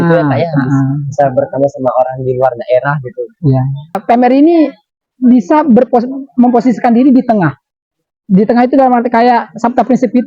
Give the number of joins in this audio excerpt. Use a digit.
1